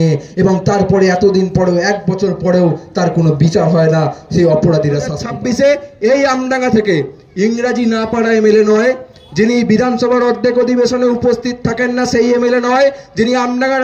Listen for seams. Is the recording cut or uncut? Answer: cut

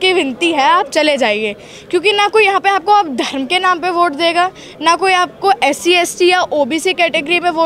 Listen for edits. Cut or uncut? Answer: uncut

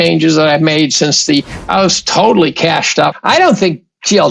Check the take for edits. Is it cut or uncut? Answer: cut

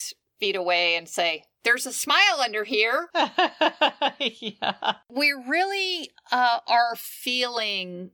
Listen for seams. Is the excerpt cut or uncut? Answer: uncut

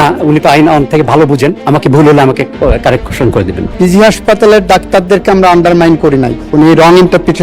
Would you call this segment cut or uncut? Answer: cut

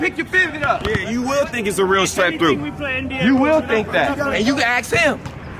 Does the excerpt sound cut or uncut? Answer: cut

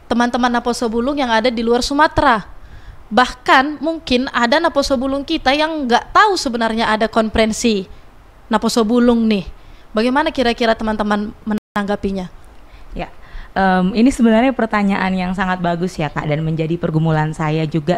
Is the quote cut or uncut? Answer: uncut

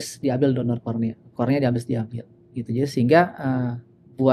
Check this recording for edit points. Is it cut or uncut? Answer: uncut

